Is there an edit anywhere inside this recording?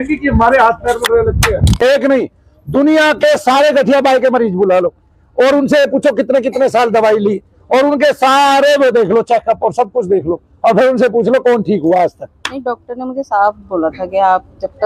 yes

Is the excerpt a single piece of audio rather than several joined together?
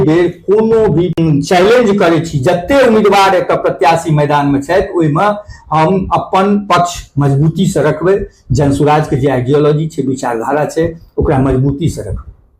no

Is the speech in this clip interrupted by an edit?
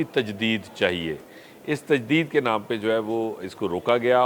no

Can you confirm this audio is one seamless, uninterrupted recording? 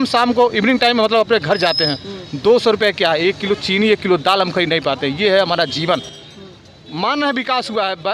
yes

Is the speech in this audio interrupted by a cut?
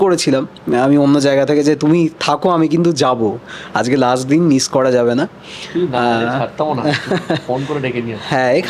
no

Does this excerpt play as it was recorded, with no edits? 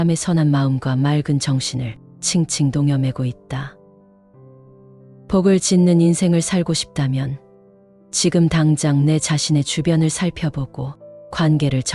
yes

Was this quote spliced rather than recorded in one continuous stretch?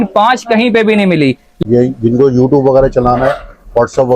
yes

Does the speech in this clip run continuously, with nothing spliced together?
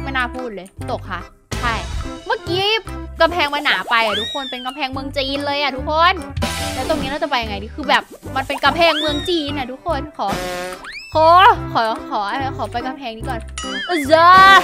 no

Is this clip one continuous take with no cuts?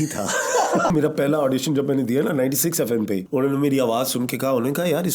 no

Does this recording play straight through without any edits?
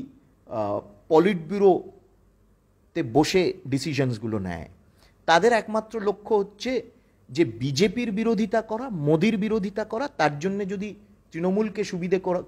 yes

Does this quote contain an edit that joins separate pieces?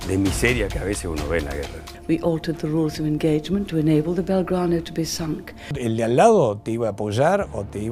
yes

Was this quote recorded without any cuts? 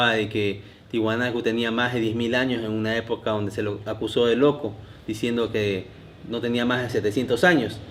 yes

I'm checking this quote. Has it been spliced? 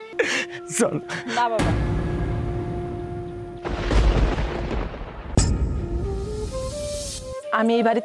yes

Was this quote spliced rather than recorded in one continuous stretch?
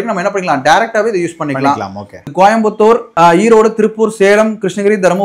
yes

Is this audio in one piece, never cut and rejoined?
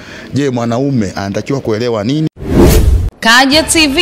no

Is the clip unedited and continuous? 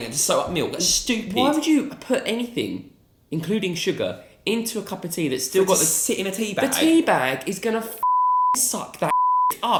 yes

